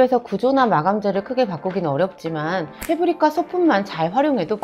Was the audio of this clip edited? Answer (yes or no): no